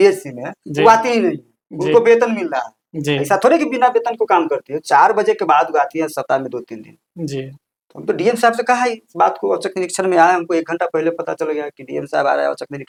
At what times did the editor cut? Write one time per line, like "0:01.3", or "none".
none